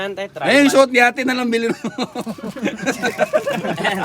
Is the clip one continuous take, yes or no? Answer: yes